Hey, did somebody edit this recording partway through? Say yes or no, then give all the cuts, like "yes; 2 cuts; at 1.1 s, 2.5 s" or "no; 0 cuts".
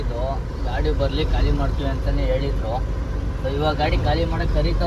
no; 0 cuts